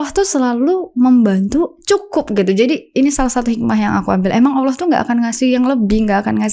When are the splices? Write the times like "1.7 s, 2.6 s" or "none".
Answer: none